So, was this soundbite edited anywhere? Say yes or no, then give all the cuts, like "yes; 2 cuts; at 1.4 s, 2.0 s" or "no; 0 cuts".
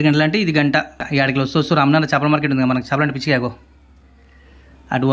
yes; 1 cut; at 1.0 s